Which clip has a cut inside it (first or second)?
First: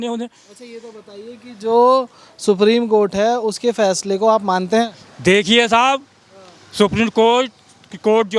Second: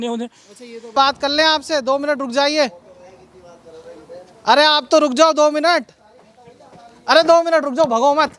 second